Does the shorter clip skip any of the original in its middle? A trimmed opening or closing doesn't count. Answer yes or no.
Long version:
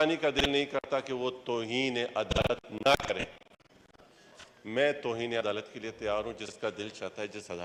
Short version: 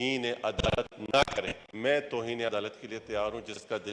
yes